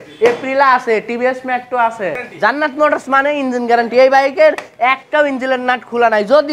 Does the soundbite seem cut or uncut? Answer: cut